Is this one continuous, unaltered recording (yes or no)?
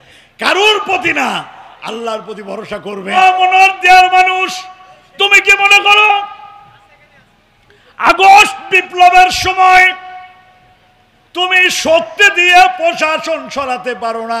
no